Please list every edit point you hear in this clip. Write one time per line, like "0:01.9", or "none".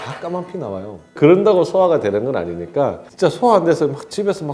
none